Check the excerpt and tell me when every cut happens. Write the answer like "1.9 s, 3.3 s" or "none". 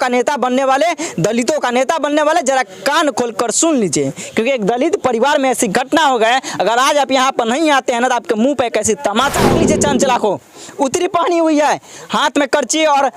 9.4 s